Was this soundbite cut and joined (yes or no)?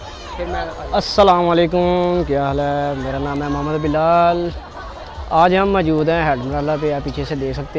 no